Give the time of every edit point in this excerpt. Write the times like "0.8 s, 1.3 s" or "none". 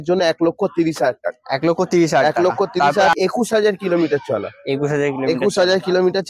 3.1 s